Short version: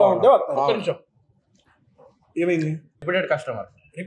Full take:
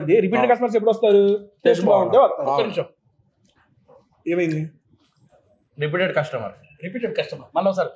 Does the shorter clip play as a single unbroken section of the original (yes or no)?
no